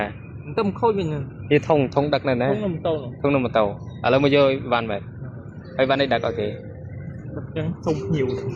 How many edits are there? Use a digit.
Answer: 0